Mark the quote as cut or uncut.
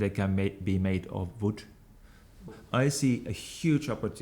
cut